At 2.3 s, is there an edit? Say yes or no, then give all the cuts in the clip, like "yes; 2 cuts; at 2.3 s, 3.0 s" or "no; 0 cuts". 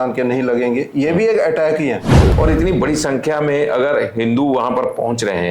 yes; 1 cut; at 2.3 s